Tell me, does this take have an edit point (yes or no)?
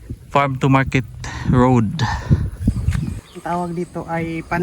yes